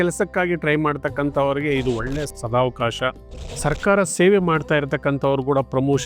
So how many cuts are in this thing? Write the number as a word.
one